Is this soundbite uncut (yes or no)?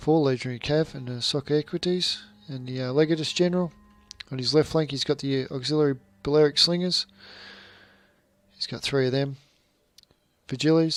yes